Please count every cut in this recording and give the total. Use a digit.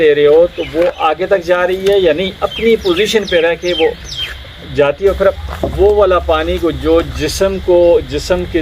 1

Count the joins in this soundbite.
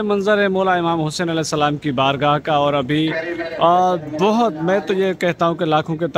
0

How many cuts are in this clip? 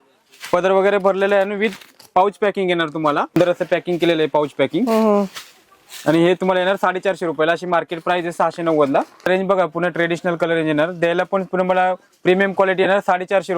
2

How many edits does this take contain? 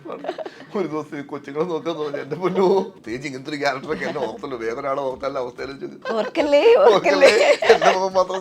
2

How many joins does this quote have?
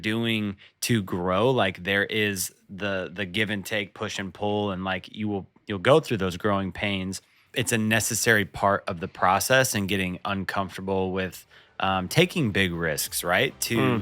1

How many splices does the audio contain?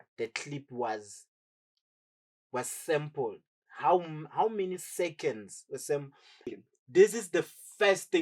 1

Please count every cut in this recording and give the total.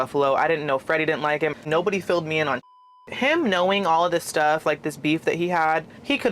2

